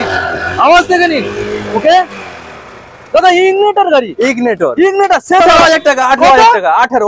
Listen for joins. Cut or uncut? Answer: cut